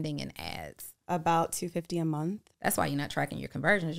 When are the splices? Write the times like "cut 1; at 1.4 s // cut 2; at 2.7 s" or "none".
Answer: cut 1; at 2.5 s